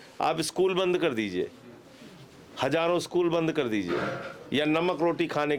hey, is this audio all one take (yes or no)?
yes